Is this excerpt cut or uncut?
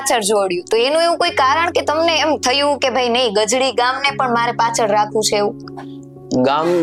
uncut